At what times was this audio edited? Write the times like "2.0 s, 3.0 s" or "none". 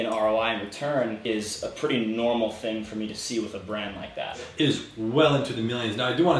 1.2 s, 4.5 s